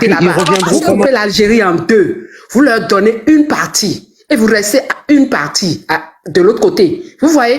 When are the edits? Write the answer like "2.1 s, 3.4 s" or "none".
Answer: 1.0 s